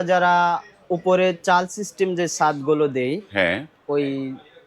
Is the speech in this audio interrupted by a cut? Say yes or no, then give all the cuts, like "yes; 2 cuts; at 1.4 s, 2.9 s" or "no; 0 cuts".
no; 0 cuts